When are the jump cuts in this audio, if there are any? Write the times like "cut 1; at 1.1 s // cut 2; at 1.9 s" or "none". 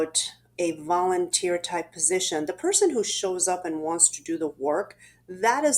none